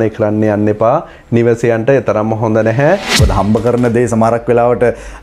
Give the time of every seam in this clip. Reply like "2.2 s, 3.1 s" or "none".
3.2 s